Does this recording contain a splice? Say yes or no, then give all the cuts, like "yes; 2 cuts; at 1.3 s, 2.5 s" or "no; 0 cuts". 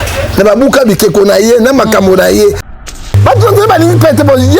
yes; 1 cut; at 2.9 s